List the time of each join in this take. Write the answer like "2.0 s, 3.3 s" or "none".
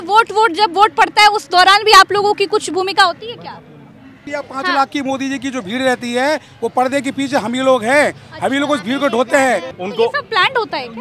4.2 s, 9.8 s